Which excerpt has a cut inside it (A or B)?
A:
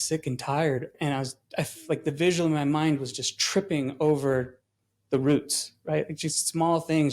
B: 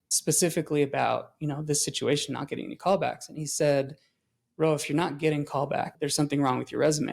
A